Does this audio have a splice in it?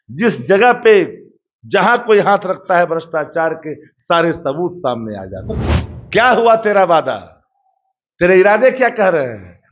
yes; 1 cut; at 5.6 s

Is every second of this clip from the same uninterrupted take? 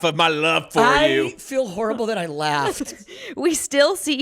no; 1 cut; at 2.9 s

